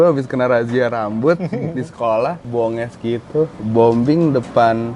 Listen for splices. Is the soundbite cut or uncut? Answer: cut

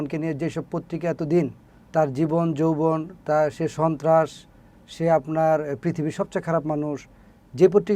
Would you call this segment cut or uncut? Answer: uncut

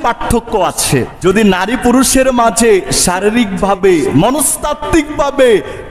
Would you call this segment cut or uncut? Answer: cut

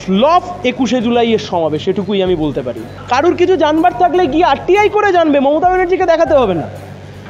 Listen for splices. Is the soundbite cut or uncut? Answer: uncut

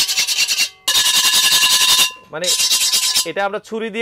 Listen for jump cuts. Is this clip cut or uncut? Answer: cut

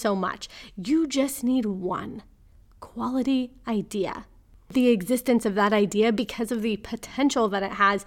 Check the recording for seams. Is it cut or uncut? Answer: cut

